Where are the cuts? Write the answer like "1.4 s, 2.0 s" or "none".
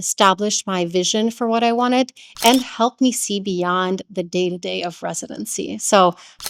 none